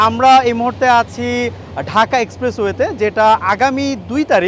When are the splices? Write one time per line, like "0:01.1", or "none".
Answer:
none